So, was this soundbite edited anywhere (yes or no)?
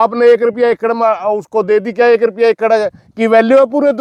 no